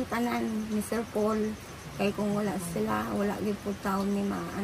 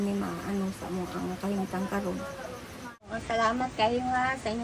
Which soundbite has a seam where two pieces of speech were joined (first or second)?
second